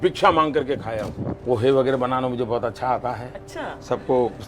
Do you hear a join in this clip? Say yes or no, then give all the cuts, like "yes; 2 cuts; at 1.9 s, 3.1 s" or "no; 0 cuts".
yes; 1 cut; at 1.4 s